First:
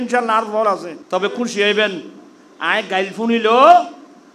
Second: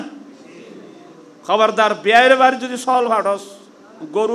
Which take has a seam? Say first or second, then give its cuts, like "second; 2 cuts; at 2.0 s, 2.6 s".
first; 1 cut; at 0.9 s